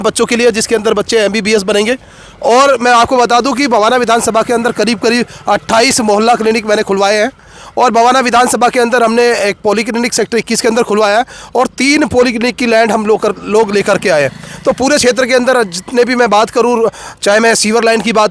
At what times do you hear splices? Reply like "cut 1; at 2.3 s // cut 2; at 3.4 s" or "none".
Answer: none